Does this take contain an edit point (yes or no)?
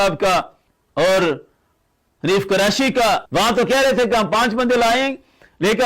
yes